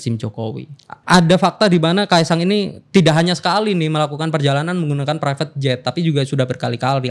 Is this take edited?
yes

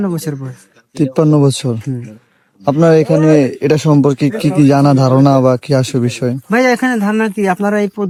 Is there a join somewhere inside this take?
no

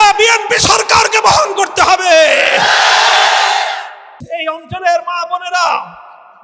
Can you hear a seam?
yes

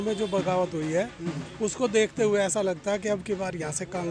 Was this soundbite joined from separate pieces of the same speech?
no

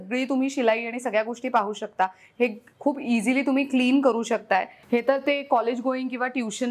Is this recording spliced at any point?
yes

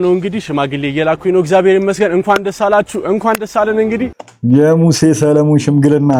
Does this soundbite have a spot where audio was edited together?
no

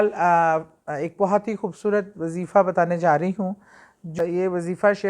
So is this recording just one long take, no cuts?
no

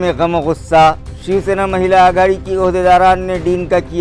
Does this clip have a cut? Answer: no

